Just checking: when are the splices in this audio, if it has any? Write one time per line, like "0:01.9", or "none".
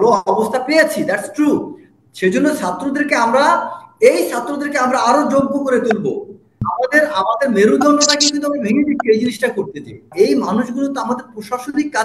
0:06.7
0:10.1